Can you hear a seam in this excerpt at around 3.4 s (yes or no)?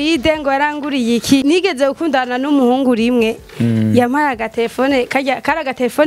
no